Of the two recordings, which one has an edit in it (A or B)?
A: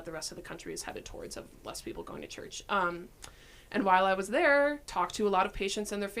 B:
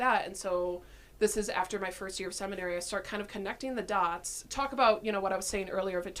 A